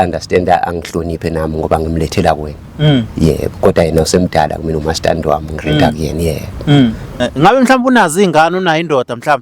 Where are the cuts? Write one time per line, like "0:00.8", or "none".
0:07.1